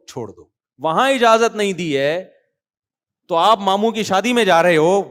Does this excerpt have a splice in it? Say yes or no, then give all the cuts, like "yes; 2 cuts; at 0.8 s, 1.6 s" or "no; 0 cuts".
no; 0 cuts